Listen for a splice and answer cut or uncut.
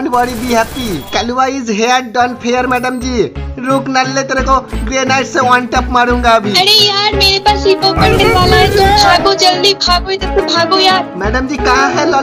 uncut